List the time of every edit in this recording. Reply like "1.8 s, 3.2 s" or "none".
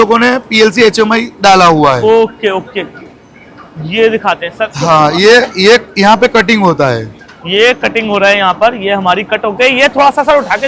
none